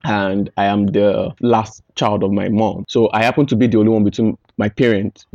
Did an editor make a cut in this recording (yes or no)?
yes